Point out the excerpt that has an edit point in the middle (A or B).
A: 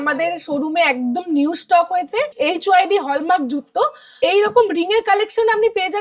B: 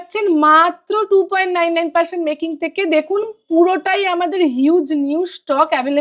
A